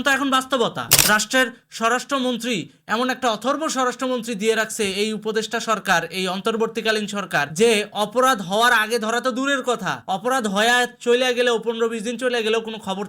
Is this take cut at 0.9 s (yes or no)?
yes